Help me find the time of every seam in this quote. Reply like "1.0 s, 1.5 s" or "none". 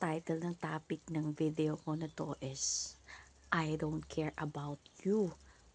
none